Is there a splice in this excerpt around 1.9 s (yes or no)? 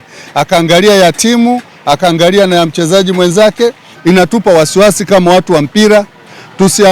no